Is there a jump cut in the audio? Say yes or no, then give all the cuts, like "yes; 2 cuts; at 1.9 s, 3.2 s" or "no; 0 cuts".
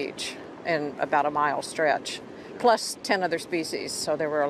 yes; 1 cut; at 1.7 s